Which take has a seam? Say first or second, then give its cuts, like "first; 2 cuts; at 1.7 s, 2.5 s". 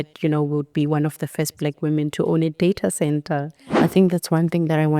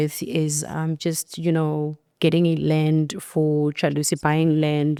first; 1 cut; at 3.8 s